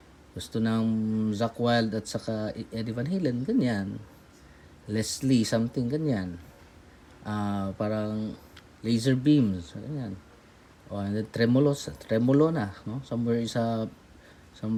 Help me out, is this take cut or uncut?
uncut